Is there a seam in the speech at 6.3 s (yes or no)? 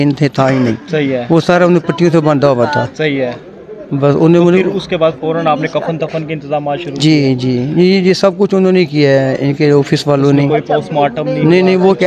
no